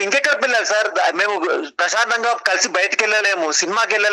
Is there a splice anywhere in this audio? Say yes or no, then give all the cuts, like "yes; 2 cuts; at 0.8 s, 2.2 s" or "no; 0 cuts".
no; 0 cuts